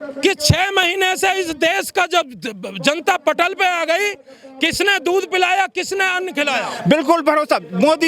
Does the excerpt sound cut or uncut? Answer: cut